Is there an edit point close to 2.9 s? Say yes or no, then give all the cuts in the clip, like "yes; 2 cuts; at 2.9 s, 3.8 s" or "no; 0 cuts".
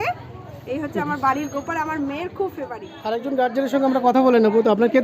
yes; 1 cut; at 2.9 s